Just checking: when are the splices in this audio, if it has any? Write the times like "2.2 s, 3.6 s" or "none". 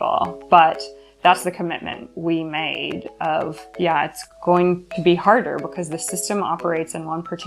none

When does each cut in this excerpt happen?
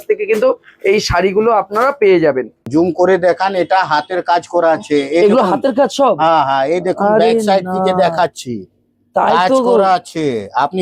2.7 s

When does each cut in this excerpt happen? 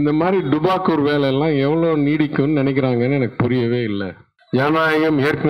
none

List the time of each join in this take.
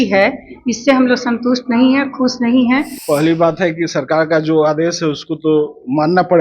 2.9 s

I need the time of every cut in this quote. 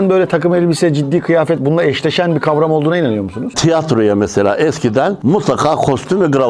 3.5 s

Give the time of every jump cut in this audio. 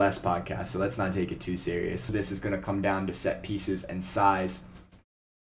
2.1 s

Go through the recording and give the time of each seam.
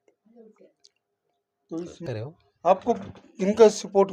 2.0 s

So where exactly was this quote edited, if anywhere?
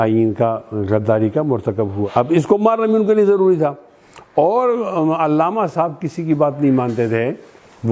2.0 s

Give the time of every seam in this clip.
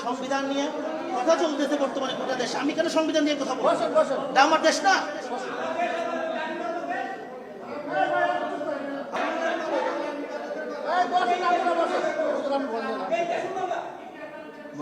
9.2 s

